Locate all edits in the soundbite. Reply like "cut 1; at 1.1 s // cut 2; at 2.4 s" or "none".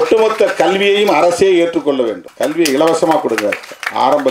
cut 1; at 2.2 s